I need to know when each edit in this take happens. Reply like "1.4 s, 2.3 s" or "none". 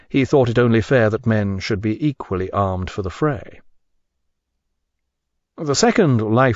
1.8 s